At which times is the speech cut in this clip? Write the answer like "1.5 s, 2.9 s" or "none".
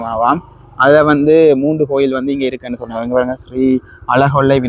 none